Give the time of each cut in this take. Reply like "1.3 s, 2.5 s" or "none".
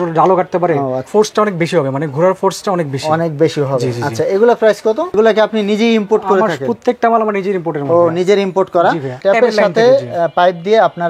1.1 s, 5.1 s, 9.1 s